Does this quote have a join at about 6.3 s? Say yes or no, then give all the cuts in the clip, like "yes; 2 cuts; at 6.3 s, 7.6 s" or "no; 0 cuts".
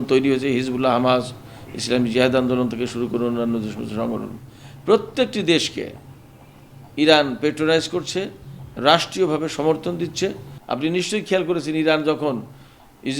no; 1 cut; at 10.5 s